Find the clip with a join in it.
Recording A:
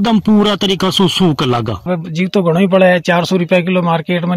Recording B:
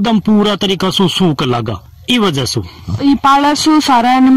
A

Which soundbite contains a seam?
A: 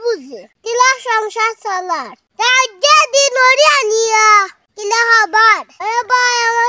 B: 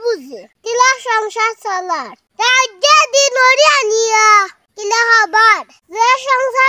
A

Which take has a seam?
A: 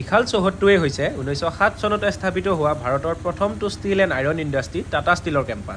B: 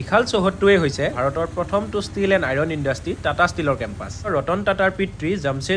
B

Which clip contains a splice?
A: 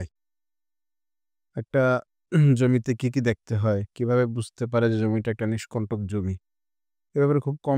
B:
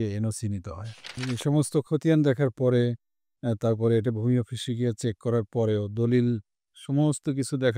B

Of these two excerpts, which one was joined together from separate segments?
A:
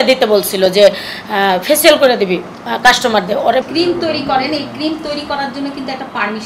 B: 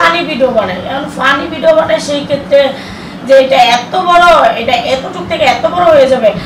A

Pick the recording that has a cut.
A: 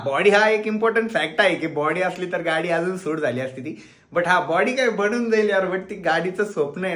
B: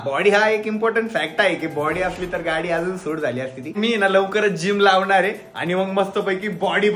B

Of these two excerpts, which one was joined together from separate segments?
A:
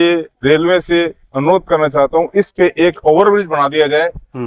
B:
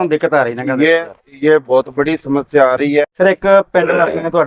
B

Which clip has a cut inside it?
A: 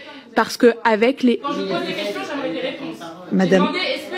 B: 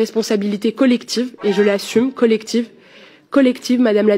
A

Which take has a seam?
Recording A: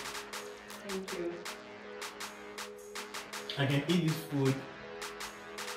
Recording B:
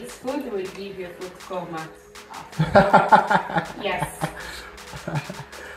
A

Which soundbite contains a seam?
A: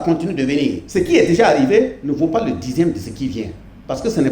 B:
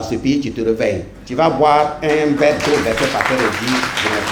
A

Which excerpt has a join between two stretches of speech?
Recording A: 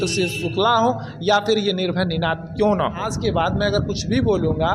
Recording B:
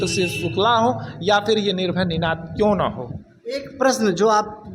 A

